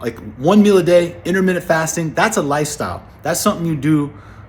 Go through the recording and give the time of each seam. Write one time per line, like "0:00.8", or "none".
none

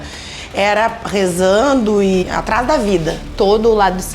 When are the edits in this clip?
0:02.2
0:03.3

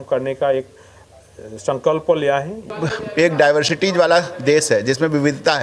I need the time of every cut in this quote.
0:02.6

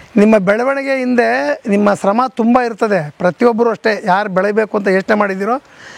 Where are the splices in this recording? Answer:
none

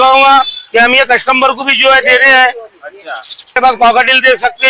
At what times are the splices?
0:03.6

